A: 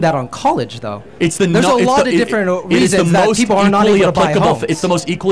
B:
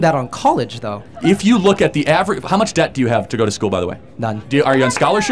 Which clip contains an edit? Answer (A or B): B